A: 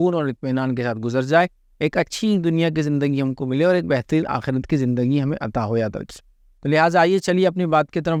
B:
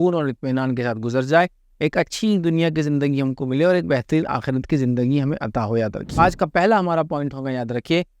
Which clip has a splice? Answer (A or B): B